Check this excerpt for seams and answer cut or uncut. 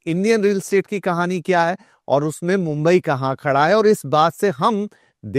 uncut